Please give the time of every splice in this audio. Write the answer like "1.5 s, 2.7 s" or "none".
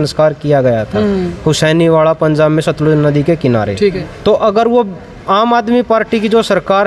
4.1 s